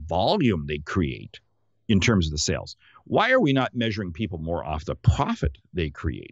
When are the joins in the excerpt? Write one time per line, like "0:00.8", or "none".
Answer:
none